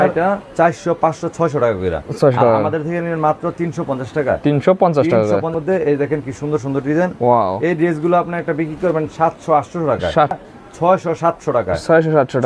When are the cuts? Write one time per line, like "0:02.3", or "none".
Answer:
0:05.6
0:10.3